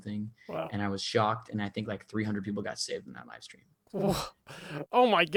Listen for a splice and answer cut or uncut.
uncut